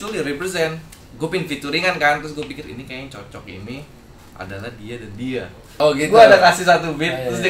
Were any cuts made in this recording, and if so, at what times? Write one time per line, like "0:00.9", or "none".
0:01.0
0:05.6